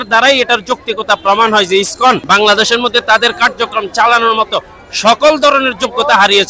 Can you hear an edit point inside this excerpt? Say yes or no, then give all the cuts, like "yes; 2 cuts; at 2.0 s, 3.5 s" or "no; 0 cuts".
yes; 1 cut; at 2.2 s